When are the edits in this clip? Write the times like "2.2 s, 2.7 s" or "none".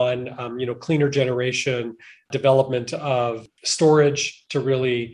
2.3 s, 3.4 s